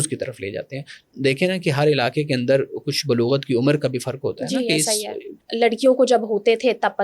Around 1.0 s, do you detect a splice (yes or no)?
yes